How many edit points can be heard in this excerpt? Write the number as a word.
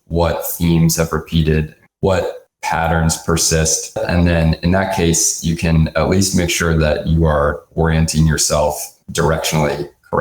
one